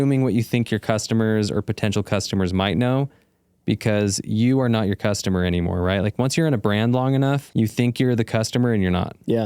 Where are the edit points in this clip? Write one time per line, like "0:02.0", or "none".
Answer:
0:07.5